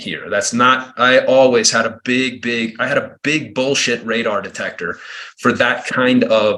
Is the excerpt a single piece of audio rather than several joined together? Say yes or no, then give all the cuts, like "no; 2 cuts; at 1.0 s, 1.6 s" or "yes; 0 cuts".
yes; 0 cuts